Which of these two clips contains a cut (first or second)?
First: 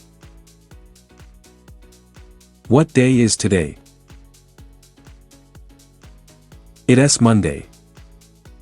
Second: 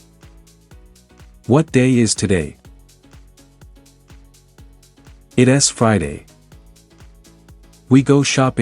first